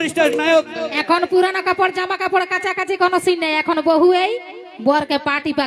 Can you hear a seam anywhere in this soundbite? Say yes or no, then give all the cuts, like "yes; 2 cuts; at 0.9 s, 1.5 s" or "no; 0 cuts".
yes; 1 cut; at 0.9 s